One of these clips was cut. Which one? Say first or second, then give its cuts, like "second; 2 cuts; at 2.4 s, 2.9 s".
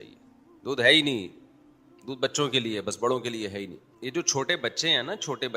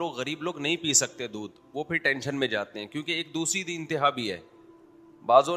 first; 1 cut; at 3.8 s